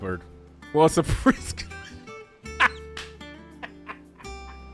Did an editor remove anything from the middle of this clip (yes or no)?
no